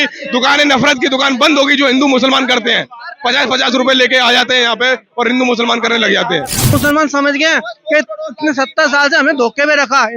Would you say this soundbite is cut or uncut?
cut